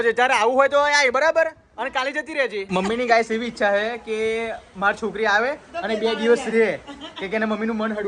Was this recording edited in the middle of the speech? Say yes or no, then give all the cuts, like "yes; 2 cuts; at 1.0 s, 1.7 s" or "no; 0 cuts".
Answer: yes; 1 cut; at 2.7 s